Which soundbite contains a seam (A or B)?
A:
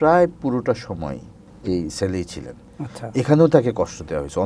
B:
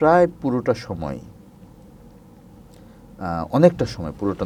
A